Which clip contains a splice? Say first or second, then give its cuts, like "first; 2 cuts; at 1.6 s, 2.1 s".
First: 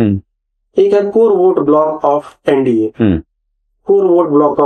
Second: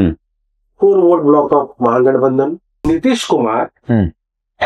second; 1 cut; at 2.9 s